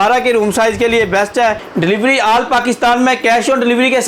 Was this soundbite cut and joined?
yes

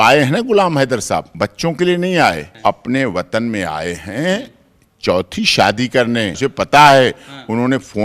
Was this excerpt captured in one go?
no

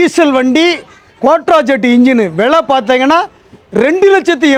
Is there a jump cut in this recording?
no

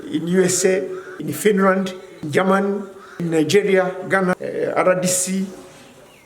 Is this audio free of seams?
no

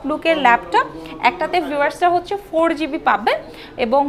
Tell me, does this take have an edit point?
no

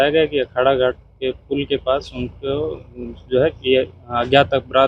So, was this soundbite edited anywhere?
no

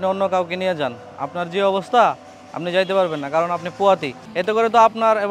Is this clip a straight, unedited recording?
no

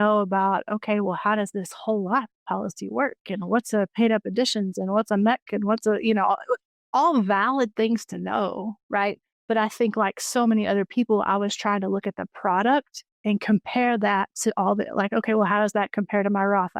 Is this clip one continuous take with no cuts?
no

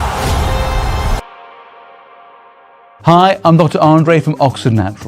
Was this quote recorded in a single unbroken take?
no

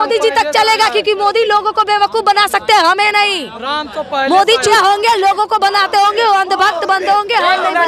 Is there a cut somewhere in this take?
no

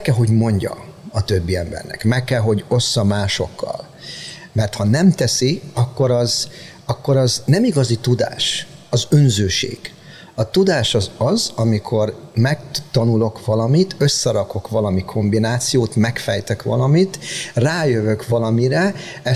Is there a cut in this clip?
no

